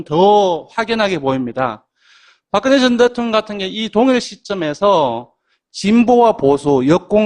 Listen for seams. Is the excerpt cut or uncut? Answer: cut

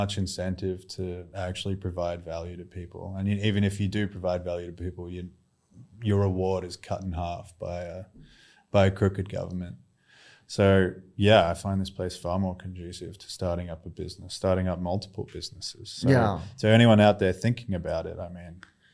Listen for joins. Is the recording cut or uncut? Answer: uncut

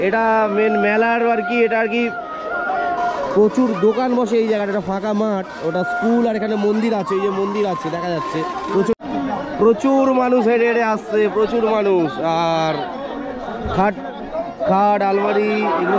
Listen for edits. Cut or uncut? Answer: cut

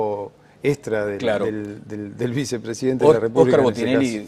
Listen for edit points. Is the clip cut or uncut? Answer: uncut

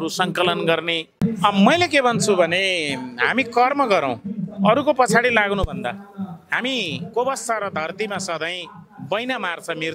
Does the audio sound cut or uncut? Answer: cut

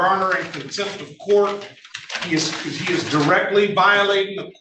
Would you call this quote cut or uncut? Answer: uncut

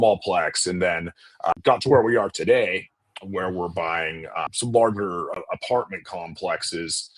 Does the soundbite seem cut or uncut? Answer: cut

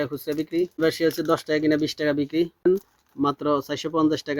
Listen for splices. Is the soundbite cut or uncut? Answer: cut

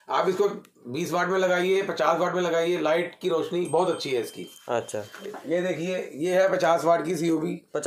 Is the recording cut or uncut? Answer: cut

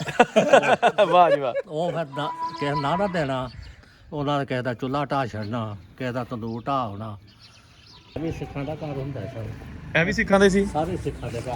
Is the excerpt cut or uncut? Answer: uncut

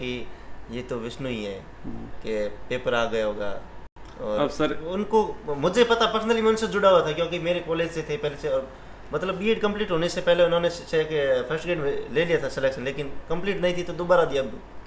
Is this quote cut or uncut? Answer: uncut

